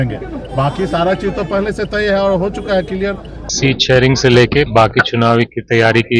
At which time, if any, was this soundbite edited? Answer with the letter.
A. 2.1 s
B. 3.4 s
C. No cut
B